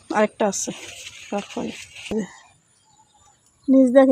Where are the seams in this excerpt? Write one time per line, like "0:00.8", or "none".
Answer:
0:02.1